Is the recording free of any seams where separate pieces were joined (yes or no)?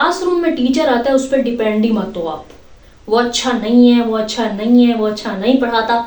yes